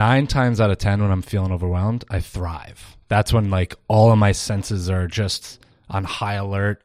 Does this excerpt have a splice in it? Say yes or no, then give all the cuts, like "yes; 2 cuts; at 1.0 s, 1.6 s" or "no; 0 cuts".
no; 0 cuts